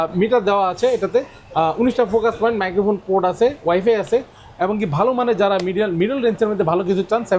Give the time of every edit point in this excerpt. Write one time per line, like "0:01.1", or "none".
none